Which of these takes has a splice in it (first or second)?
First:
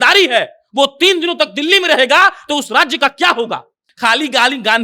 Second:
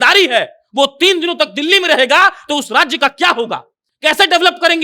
first